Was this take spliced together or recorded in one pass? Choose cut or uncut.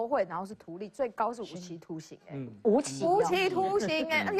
uncut